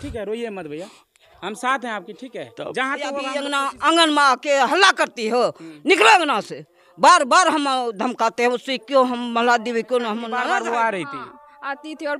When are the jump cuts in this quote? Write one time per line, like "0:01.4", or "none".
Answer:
0:03.3
0:10.3